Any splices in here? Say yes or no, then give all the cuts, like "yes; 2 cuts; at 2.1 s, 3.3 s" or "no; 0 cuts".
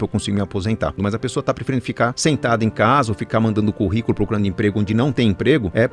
yes; 2 cuts; at 1.0 s, 2.2 s